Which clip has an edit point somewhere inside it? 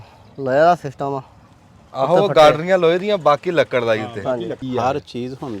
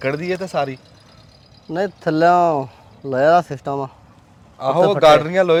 first; 1 cut; at 4.6 s

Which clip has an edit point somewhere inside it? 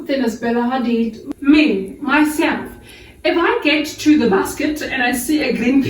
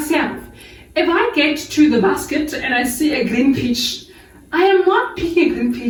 first; 1 cut; at 1.2 s

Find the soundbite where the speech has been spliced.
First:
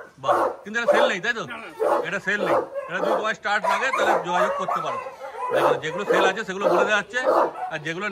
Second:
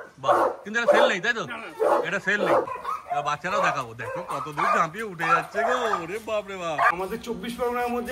second; 2 cuts; at 2.7 s, 6.9 s

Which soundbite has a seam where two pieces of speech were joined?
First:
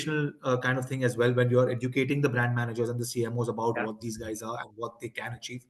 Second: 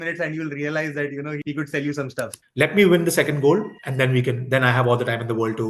second; 1 cut; at 2.4 s

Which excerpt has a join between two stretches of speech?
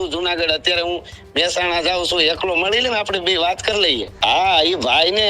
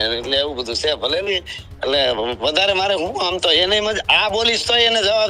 first; 1 cut; at 4.1 s

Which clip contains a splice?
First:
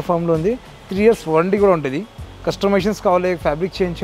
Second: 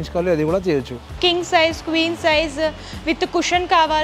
second; 1 cut; at 1.2 s

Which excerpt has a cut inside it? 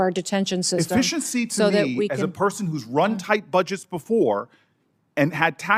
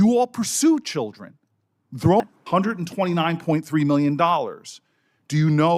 second; 1 cut; at 2.2 s

